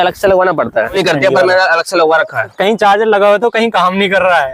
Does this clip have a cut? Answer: yes; 2 cuts; at 1.0 s, 2.5 s

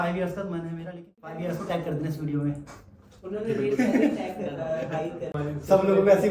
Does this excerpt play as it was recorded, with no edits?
no; 2 cuts; at 1.2 s, 5.3 s

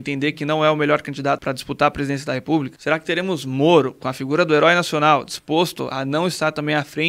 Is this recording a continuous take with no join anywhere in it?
no; 2 cuts; at 1.4 s, 2.7 s

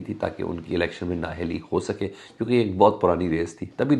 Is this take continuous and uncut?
yes; 0 cuts

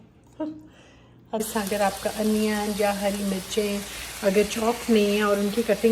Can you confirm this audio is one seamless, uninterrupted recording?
no; 1 cut; at 1.5 s

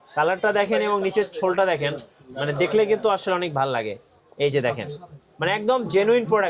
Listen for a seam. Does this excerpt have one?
no; 0 cuts

